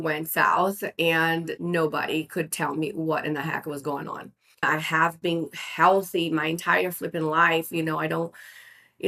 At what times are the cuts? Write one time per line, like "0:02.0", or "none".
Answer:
0:01.6
0:04.6